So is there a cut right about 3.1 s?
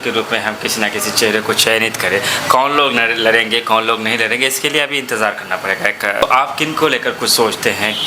no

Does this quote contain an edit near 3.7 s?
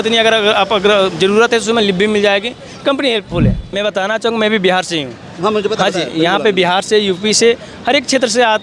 yes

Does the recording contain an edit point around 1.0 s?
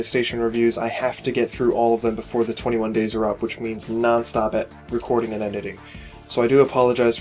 yes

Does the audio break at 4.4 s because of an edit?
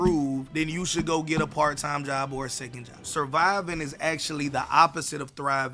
no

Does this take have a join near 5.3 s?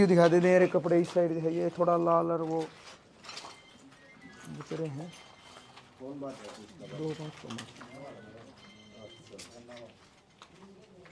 no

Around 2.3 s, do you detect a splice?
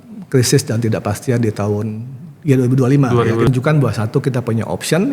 no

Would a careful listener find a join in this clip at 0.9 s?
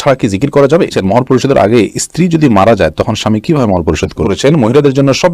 yes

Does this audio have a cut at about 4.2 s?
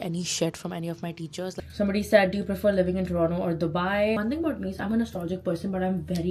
yes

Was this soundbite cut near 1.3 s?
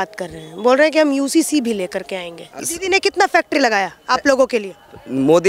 no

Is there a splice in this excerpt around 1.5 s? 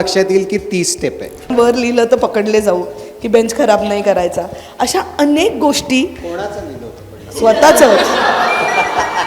yes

